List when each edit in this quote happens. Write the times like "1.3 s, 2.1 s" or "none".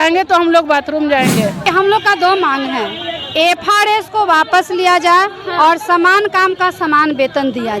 1.6 s